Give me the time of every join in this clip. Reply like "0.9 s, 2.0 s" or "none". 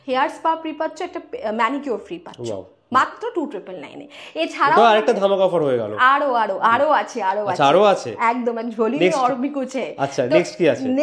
none